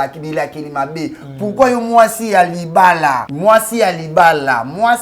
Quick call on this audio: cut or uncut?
cut